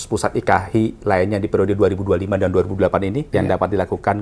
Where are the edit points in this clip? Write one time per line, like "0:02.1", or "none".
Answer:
0:03.2

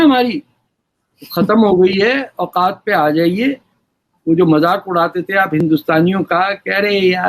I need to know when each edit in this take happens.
none

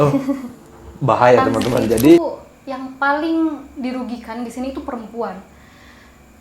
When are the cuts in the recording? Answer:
0:02.2

